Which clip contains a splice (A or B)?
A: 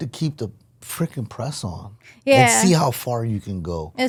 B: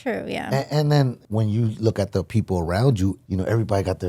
B